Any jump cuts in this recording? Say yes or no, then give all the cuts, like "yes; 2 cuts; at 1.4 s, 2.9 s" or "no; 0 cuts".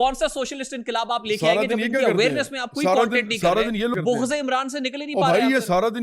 yes; 1 cut; at 3.9 s